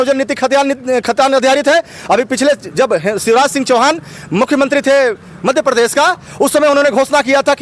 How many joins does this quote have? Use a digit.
0